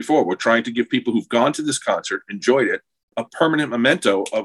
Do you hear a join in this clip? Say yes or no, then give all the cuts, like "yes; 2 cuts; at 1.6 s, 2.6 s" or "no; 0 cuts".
yes; 1 cut; at 3.2 s